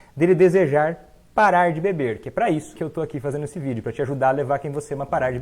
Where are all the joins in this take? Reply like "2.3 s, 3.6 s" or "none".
2.7 s